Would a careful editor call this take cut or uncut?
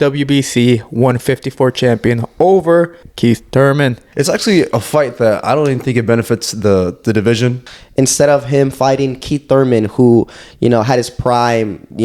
cut